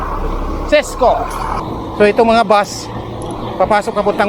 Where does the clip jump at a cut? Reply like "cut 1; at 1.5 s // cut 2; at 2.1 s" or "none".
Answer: cut 1; at 1.5 s